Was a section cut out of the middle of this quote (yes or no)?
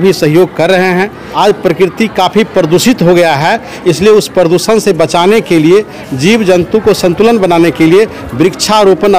yes